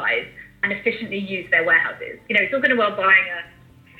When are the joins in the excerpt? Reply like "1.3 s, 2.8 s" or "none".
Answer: 2.1 s